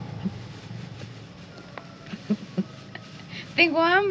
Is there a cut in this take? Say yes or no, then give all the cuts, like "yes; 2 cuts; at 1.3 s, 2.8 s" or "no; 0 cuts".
no; 0 cuts